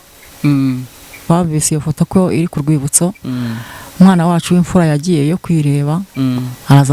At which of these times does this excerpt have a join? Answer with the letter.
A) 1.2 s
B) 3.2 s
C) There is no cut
A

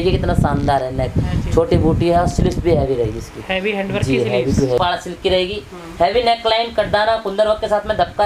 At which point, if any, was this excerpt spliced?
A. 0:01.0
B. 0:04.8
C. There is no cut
B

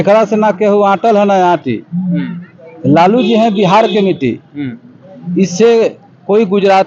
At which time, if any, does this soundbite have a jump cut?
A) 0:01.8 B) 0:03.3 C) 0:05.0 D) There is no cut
D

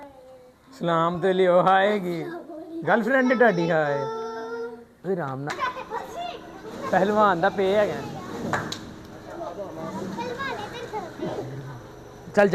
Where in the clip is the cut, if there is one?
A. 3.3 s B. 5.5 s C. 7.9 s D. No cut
B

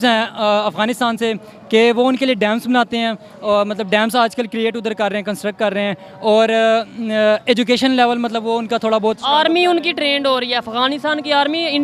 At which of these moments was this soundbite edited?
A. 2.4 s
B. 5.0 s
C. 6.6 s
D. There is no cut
D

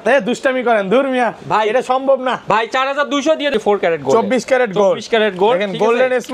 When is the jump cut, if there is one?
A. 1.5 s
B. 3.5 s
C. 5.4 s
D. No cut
B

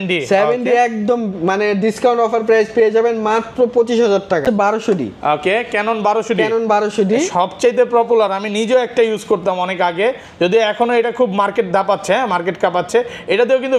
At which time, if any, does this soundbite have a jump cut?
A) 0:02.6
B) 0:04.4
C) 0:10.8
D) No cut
B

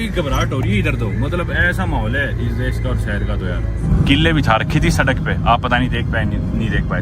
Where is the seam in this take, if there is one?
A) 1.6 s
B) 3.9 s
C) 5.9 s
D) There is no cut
B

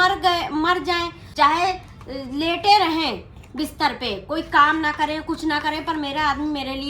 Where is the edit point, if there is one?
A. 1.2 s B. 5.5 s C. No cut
A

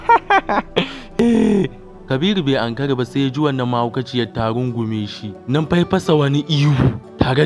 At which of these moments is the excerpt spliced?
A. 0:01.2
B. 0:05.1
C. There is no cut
A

